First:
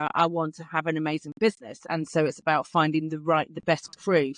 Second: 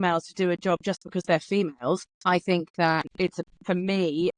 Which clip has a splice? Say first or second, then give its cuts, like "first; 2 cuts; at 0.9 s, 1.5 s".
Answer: second; 2 cuts; at 2.1 s, 3.1 s